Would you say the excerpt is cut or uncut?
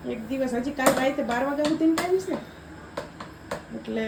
uncut